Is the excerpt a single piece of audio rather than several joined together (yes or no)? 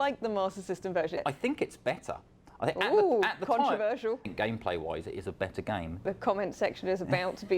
no